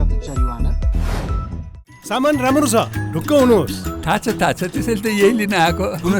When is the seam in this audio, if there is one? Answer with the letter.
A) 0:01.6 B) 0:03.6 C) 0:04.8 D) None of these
A